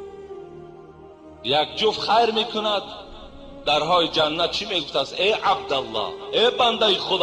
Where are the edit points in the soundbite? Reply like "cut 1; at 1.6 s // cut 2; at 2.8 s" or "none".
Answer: cut 1; at 1.4 s